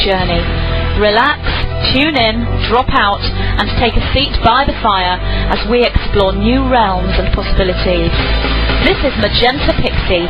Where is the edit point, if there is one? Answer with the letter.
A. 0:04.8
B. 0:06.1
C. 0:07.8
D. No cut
C